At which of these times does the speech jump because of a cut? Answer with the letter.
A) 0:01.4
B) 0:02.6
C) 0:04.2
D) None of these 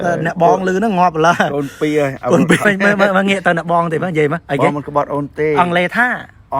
B